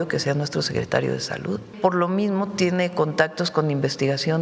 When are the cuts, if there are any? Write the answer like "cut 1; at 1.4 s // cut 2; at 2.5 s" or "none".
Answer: cut 1; at 1.7 s

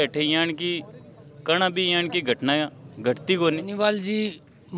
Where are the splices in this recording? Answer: cut 1; at 3.7 s

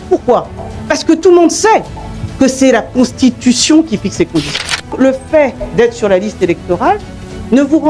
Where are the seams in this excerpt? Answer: cut 1; at 4.9 s

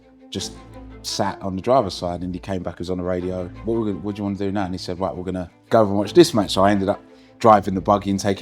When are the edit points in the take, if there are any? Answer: cut 1; at 3.5 s // cut 2; at 5.6 s

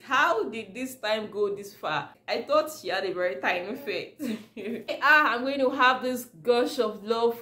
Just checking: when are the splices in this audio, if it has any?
cut 1; at 2.2 s // cut 2; at 4.9 s

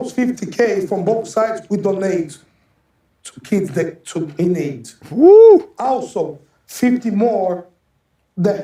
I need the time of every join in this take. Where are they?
none

